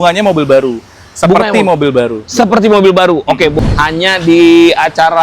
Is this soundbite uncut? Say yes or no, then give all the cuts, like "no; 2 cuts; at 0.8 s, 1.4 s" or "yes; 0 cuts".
no; 1 cut; at 3.5 s